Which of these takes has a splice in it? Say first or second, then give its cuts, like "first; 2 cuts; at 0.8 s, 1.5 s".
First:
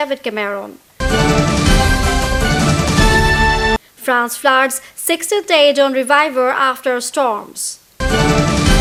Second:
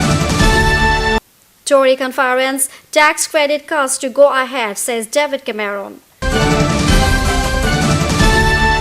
second; 1 cut; at 0.9 s